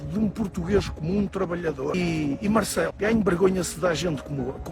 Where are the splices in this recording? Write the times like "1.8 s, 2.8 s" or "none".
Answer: 1.9 s, 2.9 s